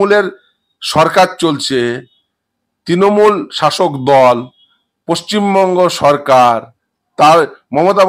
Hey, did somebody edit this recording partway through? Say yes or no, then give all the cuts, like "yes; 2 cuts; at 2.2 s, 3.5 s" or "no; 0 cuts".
no; 0 cuts